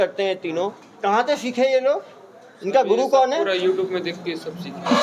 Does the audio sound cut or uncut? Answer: uncut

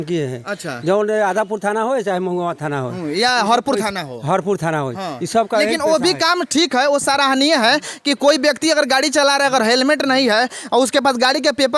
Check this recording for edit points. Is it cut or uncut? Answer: uncut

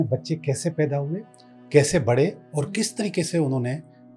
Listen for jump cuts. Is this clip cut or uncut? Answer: uncut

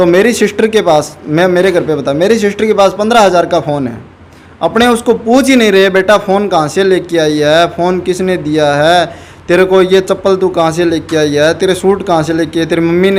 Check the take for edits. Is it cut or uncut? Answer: uncut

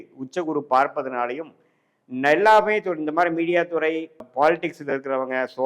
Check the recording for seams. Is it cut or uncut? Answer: cut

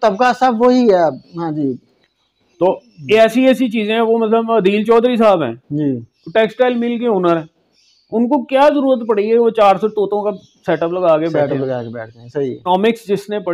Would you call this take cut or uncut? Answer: cut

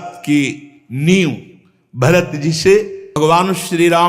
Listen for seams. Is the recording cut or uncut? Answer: cut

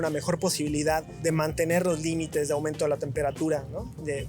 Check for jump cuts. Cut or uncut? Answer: cut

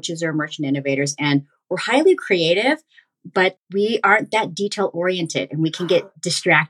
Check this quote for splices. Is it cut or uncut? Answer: uncut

